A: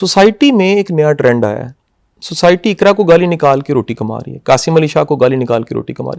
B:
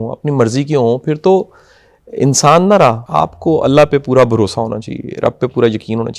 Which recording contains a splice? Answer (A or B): B